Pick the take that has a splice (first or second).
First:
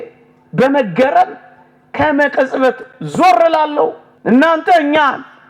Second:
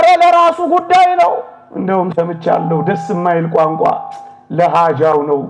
first